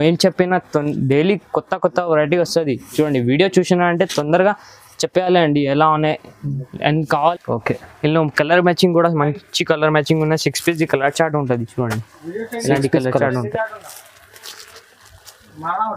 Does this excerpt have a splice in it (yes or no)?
yes